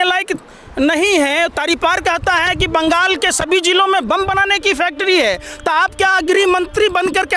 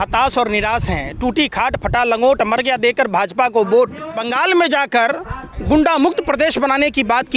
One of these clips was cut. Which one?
second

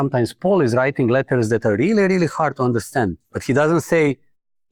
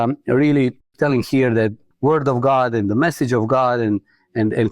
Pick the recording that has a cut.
second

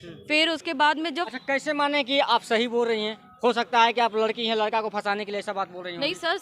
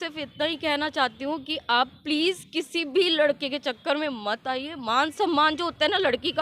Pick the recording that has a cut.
first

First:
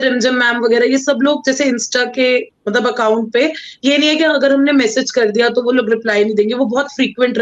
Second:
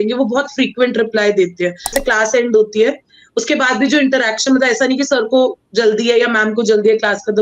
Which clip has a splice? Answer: second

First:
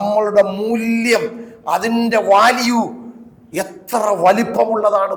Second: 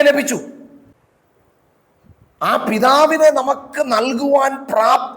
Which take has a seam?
second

